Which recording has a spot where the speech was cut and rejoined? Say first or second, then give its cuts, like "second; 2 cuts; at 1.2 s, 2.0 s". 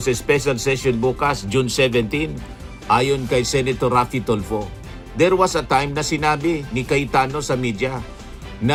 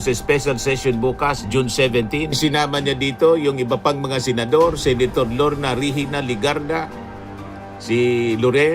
second; 1 cut; at 2.3 s